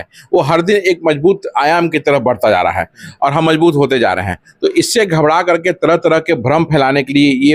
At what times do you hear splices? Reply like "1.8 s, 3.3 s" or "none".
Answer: none